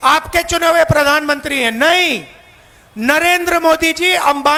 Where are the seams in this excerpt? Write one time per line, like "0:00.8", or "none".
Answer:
none

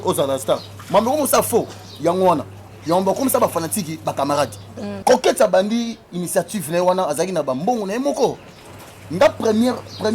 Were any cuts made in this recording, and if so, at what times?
0:05.0

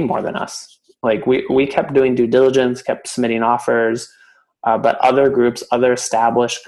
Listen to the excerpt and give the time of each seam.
none

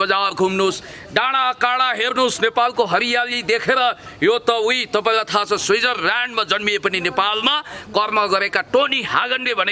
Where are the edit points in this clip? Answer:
none

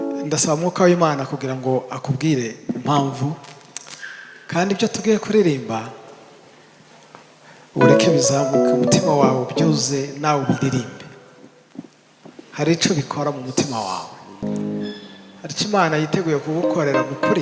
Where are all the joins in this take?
0:14.4

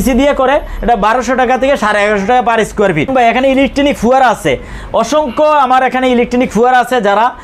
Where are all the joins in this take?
none

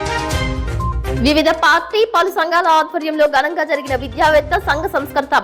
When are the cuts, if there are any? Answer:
0:01.1

